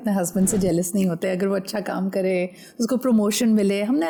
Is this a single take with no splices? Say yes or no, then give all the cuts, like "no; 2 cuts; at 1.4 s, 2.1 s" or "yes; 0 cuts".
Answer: yes; 0 cuts